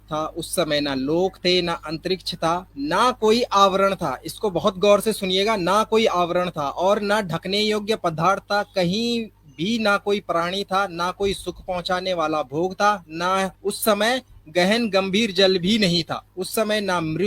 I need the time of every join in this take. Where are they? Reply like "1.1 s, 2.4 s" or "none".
2.7 s, 13.6 s, 16.3 s